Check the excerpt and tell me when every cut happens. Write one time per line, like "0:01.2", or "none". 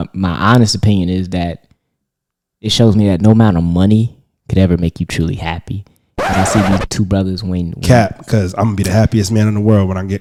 none